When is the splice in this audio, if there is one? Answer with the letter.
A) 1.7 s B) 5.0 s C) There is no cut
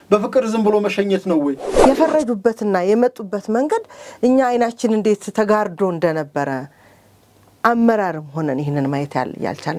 A